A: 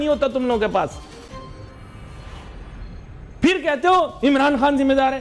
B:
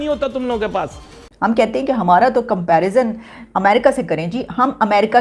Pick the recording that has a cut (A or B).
B